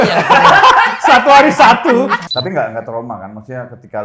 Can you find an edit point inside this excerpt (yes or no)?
yes